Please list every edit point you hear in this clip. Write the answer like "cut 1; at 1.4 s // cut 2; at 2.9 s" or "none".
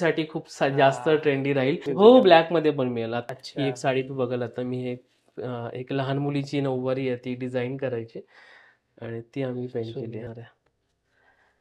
cut 1; at 1.9 s // cut 2; at 3.2 s // cut 3; at 10.3 s